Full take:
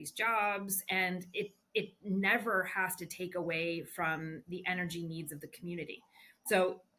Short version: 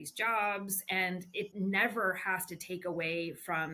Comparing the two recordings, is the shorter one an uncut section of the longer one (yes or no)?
no